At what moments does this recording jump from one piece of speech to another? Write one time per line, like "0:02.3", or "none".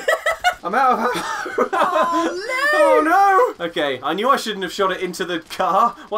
none